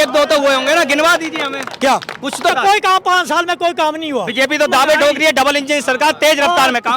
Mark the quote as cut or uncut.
cut